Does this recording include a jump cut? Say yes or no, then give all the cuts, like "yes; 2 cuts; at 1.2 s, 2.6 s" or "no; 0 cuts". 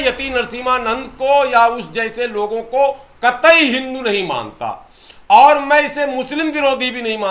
no; 0 cuts